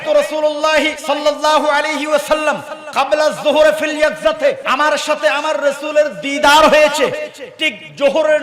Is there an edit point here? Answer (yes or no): yes